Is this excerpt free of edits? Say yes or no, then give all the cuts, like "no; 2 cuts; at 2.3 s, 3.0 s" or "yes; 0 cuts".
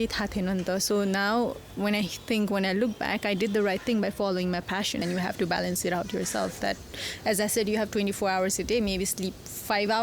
no; 1 cut; at 5.0 s